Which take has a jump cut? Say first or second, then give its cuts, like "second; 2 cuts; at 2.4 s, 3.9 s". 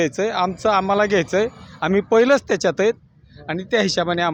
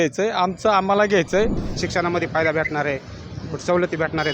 second; 1 cut; at 1.6 s